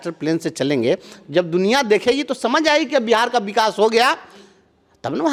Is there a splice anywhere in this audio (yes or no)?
no